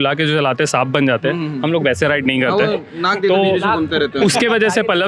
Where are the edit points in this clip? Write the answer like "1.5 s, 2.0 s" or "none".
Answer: none